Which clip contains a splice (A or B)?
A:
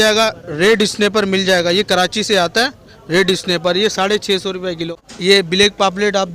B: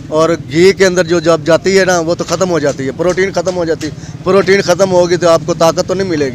A